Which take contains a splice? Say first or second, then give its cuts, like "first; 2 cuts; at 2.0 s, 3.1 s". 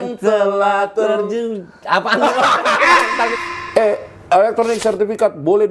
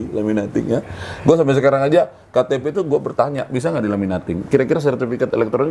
first; 1 cut; at 3.3 s